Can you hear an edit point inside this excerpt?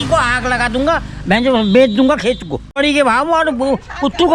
yes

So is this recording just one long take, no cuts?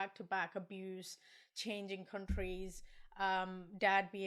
yes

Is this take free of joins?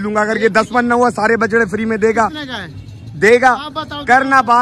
yes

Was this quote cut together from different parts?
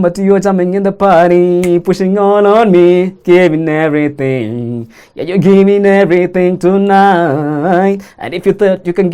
no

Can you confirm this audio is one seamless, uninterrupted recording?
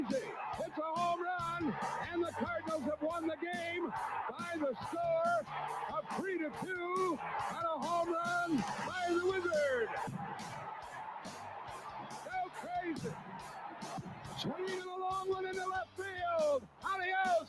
yes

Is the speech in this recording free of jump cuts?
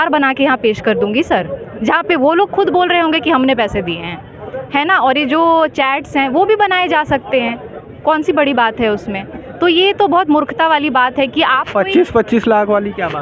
yes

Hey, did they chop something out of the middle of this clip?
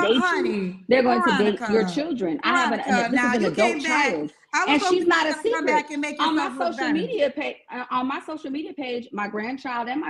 no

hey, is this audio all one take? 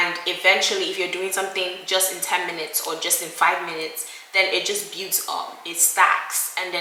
yes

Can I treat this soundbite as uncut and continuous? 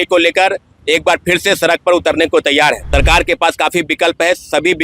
no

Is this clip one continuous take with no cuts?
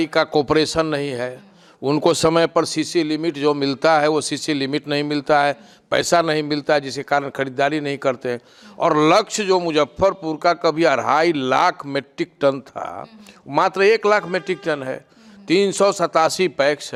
yes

